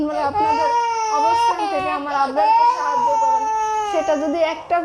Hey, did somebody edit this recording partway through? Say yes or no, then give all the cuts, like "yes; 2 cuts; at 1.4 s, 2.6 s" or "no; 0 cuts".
no; 0 cuts